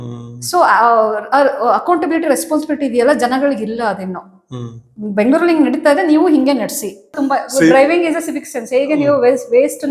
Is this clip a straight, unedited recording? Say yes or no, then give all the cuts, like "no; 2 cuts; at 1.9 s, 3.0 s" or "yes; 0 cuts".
no; 1 cut; at 7.2 s